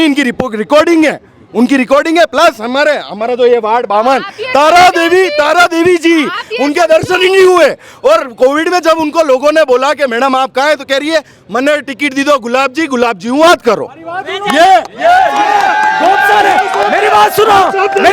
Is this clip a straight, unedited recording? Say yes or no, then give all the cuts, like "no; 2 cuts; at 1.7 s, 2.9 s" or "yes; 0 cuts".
yes; 0 cuts